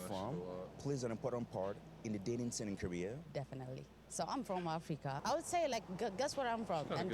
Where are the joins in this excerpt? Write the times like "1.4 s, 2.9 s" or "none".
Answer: 5.2 s